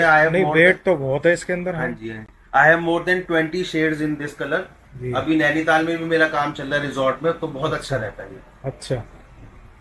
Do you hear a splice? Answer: no; 0 cuts

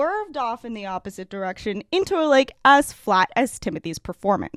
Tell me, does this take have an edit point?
no; 0 cuts

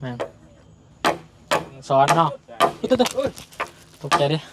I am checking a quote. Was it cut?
yes; 1 cut; at 1.8 s

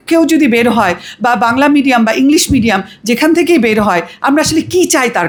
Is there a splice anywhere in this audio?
no; 0 cuts

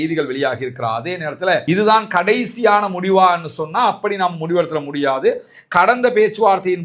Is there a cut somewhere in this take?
yes; 1 cut; at 1.6 s

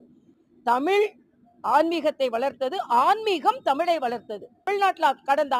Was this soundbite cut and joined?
yes; 1 cut; at 4.7 s

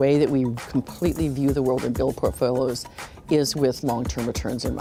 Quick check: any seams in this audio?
no; 0 cuts

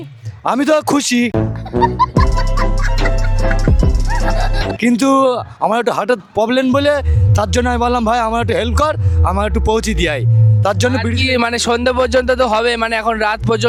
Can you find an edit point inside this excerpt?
no; 0 cuts

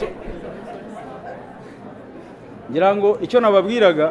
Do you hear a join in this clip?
no; 0 cuts

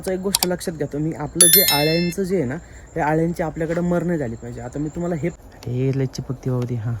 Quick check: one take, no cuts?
no; 1 cut; at 5.3 s

